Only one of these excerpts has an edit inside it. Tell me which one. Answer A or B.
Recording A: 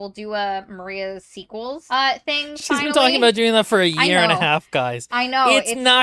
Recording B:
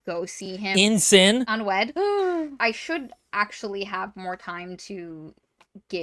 B